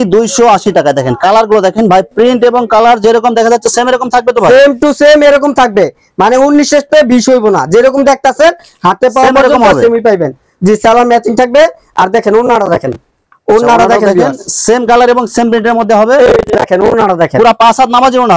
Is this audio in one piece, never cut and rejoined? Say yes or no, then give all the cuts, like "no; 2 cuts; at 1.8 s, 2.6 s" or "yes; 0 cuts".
yes; 0 cuts